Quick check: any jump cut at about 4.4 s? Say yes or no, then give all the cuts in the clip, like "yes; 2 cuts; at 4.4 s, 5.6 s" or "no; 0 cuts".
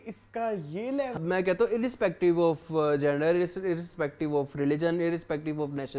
no; 1 cut; at 1.2 s